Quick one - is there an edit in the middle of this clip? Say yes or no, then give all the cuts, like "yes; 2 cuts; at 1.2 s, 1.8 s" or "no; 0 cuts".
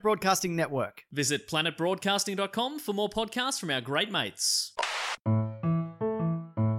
yes; 1 cut; at 5.3 s